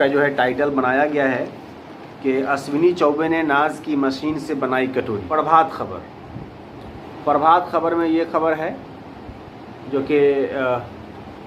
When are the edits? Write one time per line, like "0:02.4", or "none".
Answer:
0:05.3